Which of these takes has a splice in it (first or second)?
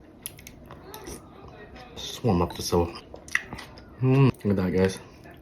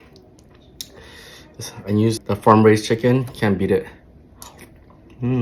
first